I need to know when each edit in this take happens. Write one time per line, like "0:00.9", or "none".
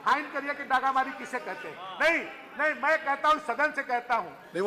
none

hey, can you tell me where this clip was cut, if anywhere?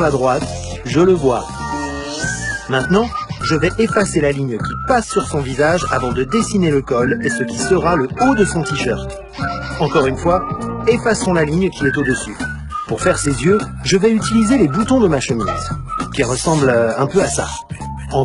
0:01.8

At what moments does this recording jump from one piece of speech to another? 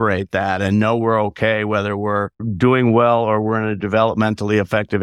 0:02.5

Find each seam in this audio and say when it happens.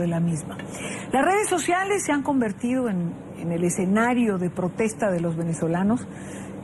none

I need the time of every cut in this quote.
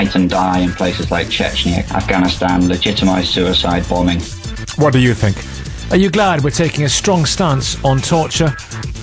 0:05.8

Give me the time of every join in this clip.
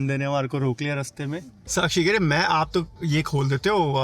0:01.5

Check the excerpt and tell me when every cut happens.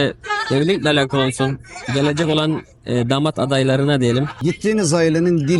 0:04.4

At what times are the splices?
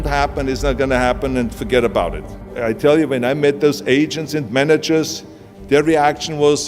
0:02.5

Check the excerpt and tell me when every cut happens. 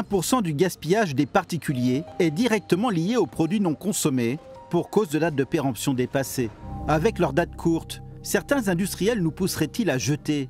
0:02.1
0:04.5
0:06.7

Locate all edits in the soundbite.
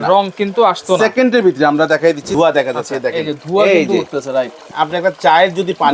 0:02.3
0:04.7

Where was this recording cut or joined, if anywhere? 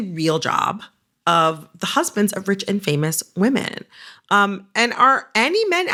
none

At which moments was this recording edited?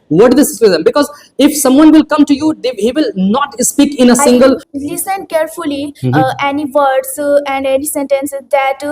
0:04.7

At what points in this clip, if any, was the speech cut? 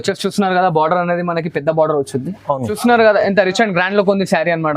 0:02.7

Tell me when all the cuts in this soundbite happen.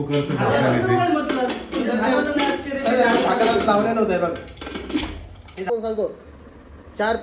0:05.7

